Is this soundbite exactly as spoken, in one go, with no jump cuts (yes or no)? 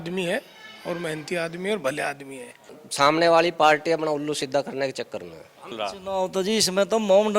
no